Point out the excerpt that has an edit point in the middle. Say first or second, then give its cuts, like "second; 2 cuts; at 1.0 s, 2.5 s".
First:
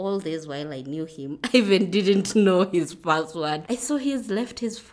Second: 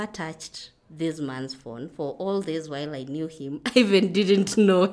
first; 1 cut; at 3.6 s